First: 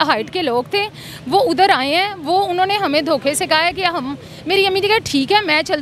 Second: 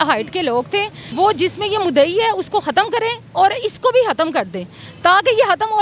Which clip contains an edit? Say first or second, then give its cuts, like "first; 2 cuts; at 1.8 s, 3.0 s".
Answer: second; 1 cut; at 1.0 s